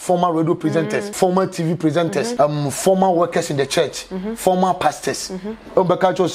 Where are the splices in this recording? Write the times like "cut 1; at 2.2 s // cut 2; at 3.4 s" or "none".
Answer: cut 1; at 1.1 s // cut 2; at 2.3 s